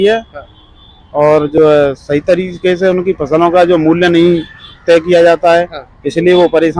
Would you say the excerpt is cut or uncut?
uncut